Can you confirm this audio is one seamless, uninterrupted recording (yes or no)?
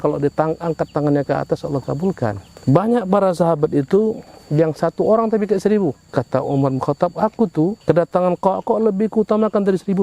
no